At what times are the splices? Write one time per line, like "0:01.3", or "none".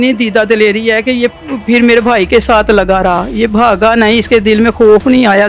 none